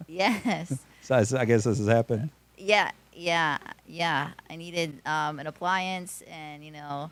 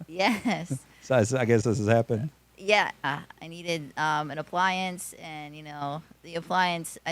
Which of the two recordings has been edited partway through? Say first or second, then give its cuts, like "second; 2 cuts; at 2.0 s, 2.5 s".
second; 1 cut; at 3.1 s